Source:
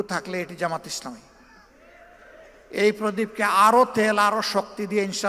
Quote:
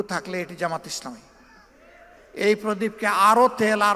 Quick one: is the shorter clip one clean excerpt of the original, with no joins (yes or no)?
no